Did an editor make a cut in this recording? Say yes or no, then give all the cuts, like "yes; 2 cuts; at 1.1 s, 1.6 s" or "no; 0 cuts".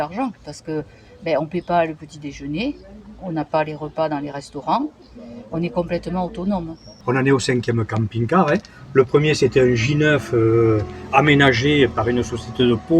yes; 1 cut; at 6.9 s